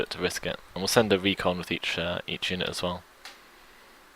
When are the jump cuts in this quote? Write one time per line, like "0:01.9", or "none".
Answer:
0:02.7